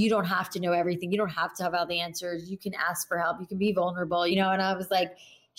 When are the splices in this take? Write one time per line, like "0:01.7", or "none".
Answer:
0:04.3